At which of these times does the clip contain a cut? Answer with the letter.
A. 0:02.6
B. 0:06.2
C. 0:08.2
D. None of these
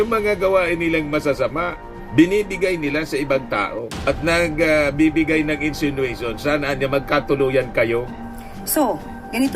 C